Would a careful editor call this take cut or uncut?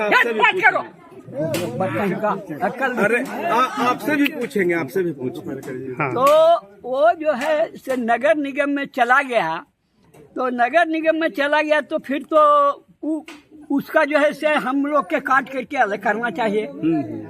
cut